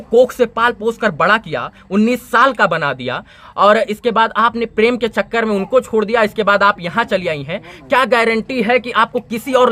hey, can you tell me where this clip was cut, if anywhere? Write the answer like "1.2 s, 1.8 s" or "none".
none